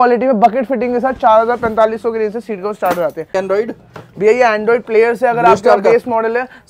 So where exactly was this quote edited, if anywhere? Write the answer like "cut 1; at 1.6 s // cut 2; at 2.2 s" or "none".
cut 1; at 3.3 s